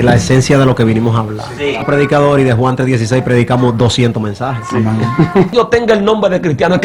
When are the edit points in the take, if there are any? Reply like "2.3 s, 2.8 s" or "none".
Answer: 1.8 s, 5.5 s